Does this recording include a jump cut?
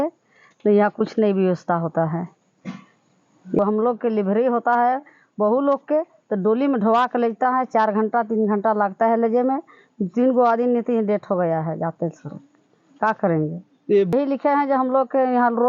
no; 0 cuts

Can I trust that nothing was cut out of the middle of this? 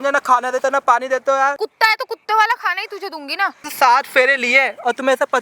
no; 2 cuts; at 1.6 s, 3.7 s

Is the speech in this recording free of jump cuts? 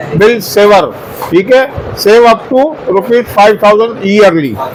yes; 0 cuts

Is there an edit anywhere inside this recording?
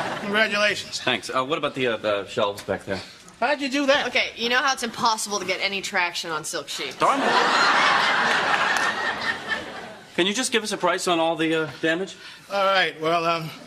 no; 0 cuts

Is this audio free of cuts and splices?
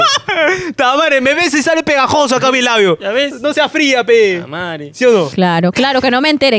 yes; 0 cuts

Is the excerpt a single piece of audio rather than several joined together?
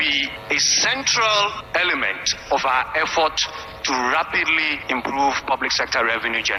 yes; 0 cuts

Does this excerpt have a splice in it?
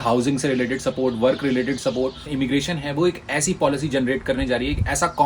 yes; 1 cut; at 2.3 s

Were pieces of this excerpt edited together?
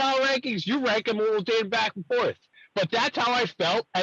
yes; 1 cut; at 2.5 s

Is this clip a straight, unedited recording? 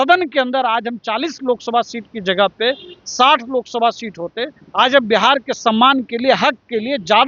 yes; 0 cuts

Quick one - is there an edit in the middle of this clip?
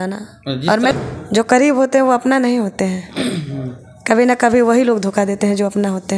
yes; 1 cut; at 0.9 s

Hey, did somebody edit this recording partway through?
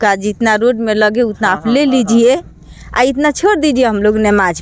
no; 0 cuts

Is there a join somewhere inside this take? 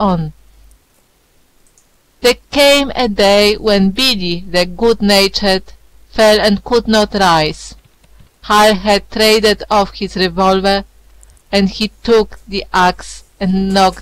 yes; 1 cut; at 5.4 s

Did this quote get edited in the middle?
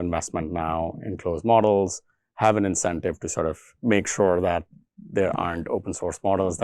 yes; 1 cut; at 3.7 s

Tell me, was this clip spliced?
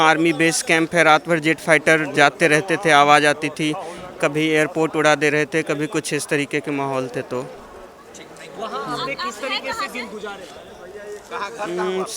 no; 0 cuts

